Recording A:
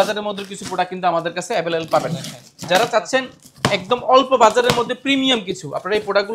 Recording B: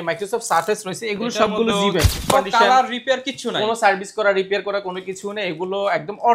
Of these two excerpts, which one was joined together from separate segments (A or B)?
B